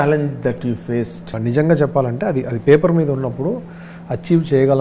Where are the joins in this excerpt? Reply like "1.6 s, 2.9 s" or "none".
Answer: 1.3 s